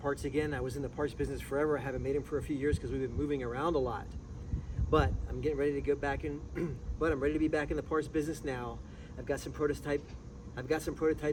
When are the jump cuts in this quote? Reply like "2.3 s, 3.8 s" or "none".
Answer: none